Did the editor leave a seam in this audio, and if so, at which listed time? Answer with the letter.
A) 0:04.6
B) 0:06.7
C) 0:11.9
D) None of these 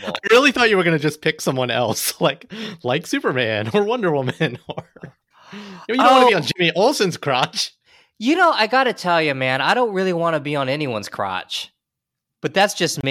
D